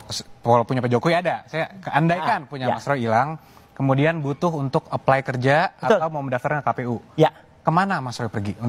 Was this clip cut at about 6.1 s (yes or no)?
yes